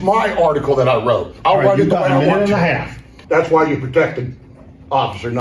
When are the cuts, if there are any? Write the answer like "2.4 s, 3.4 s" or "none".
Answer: 3.1 s